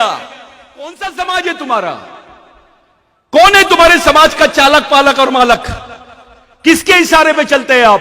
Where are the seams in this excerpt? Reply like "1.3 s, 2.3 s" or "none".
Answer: 0.9 s